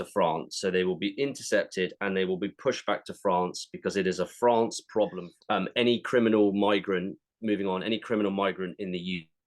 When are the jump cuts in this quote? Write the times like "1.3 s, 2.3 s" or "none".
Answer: 5.2 s